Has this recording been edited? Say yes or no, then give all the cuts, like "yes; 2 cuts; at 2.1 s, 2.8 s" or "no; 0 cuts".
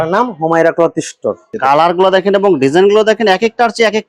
yes; 1 cut; at 1.5 s